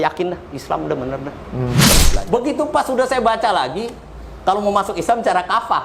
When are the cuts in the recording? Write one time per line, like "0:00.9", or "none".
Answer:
0:01.9